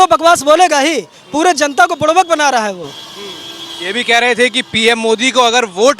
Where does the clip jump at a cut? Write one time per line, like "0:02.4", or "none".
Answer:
none

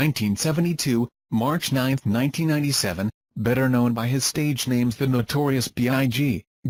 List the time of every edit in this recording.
none

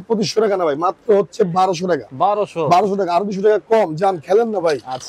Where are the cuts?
none

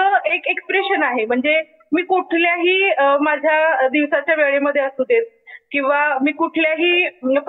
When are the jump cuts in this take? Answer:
none

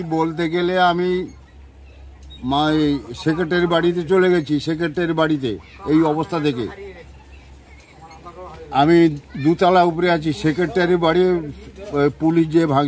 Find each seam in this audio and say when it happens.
none

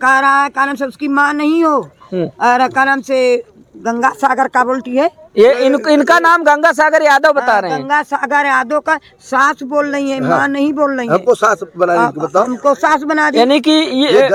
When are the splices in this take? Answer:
none

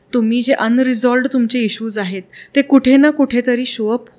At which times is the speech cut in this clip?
none

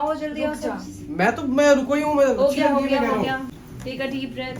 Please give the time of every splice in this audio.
0:03.5

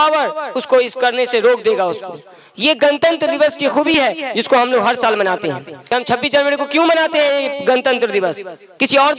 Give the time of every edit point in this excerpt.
0:05.8

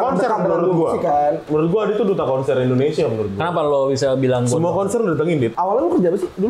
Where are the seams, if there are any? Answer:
0:05.5

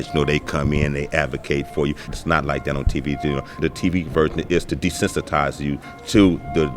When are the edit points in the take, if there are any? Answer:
0:02.1
0:03.5

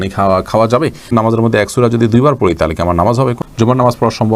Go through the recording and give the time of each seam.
0:01.1
0:03.4

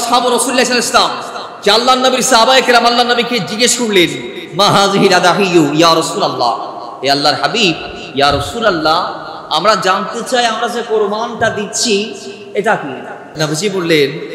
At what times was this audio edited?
0:13.4

